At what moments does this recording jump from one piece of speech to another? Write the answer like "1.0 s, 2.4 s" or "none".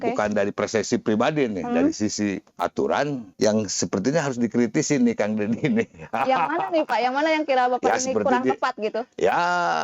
2.5 s, 3.3 s